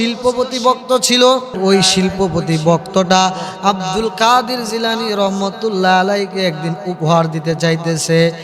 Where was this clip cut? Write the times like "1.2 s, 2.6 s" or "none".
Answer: 1.6 s